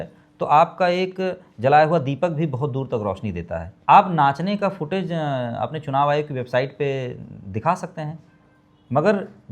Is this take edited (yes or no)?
yes